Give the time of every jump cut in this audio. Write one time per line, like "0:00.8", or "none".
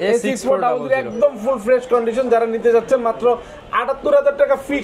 none